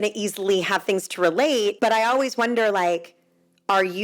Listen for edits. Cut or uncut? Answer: cut